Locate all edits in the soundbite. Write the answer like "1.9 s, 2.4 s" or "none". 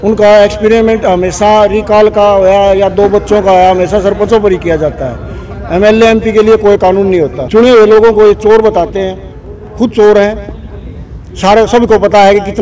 7.4 s